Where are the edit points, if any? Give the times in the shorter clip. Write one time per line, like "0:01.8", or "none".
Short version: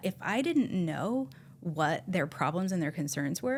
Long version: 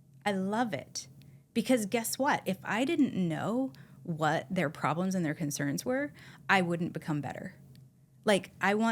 none

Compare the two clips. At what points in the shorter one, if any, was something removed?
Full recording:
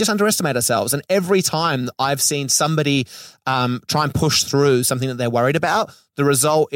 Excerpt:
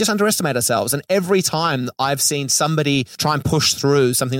0:03.1

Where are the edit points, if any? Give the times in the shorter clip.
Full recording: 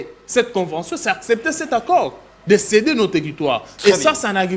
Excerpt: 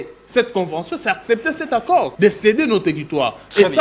0:02.1

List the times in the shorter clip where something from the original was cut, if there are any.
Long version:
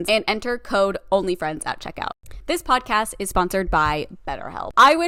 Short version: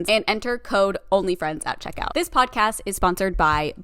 0:02.0

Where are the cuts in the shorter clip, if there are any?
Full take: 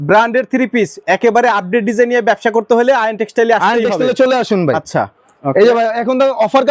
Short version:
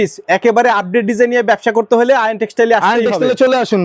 none

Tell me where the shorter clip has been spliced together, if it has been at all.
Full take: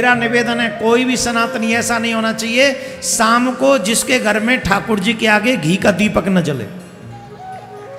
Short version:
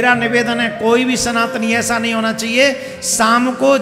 none

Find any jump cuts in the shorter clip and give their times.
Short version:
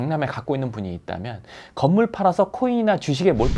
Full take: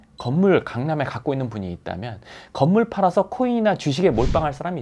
none

